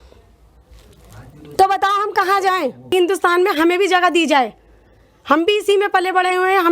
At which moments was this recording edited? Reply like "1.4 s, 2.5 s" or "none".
2.9 s